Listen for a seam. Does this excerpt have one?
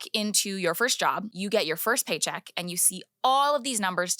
yes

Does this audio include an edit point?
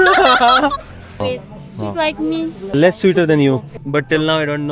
yes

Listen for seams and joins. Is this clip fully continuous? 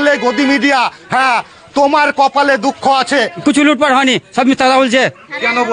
no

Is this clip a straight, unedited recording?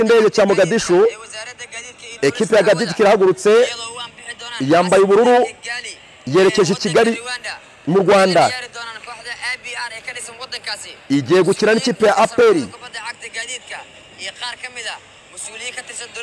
yes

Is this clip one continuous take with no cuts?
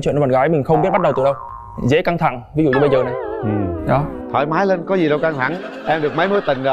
yes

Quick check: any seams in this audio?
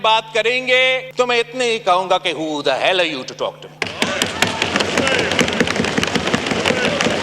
yes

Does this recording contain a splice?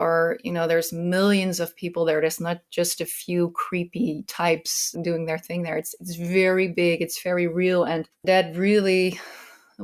yes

